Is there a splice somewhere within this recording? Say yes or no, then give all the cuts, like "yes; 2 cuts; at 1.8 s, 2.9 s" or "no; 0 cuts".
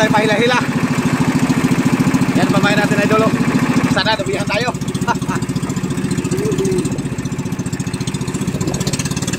no; 0 cuts